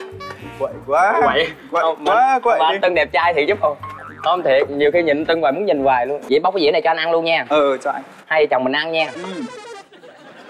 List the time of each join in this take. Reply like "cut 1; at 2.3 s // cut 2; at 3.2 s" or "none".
cut 1; at 6.2 s